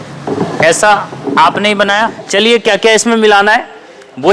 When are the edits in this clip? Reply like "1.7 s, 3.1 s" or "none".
2.2 s

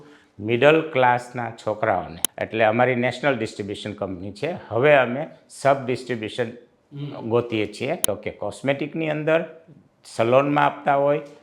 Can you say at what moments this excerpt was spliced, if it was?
2.2 s, 8.1 s

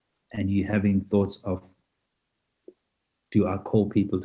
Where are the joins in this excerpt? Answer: none

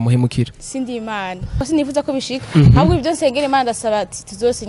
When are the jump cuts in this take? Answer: 1.5 s

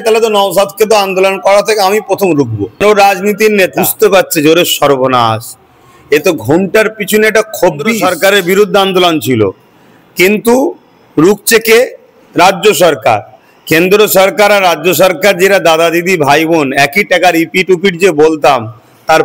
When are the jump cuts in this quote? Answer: 2.8 s, 3.8 s, 8.0 s

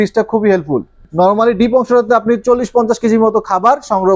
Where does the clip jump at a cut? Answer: 1.0 s

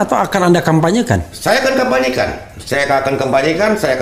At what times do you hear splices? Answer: none

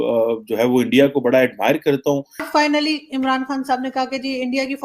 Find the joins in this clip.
2.5 s

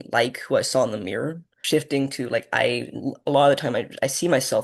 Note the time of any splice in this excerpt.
1.5 s

